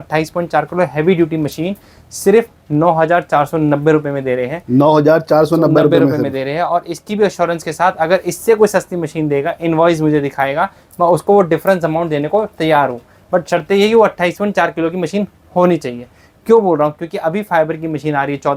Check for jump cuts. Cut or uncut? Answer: uncut